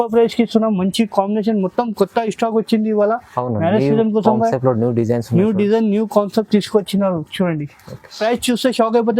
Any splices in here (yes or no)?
yes